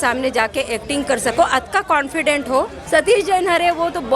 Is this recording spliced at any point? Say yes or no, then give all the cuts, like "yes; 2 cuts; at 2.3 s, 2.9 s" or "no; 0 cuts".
yes; 1 cut; at 2.8 s